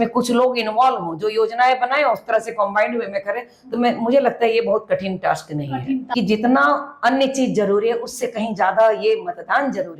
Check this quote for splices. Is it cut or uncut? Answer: cut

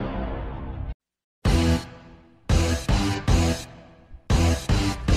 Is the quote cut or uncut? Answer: uncut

